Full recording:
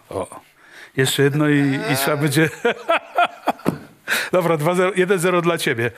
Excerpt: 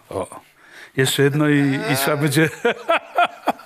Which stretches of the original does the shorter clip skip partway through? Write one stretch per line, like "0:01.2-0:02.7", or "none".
none